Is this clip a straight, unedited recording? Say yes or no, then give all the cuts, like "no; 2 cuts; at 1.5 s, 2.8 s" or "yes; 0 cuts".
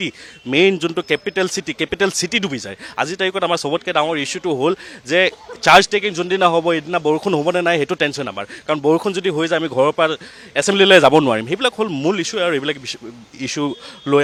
yes; 0 cuts